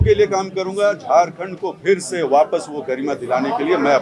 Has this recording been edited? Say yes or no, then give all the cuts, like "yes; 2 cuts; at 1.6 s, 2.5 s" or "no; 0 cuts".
no; 0 cuts